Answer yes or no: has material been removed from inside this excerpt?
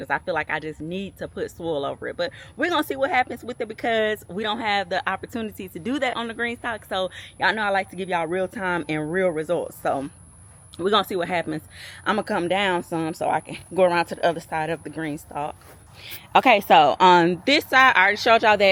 no